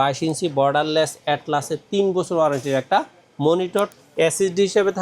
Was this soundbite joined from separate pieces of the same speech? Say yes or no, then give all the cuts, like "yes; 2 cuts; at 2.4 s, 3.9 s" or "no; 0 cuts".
yes; 1 cut; at 3.9 s